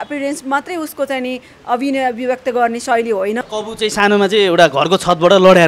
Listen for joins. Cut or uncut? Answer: cut